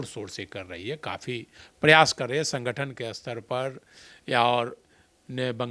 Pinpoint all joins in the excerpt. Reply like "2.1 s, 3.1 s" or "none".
none